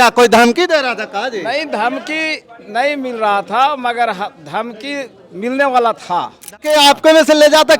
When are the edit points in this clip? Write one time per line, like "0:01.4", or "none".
0:06.6